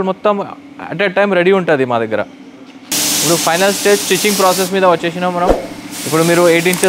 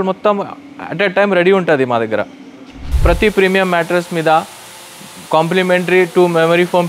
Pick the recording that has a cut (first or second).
second